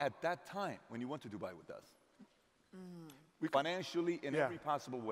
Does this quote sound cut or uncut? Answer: uncut